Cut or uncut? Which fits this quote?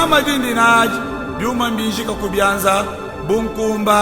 uncut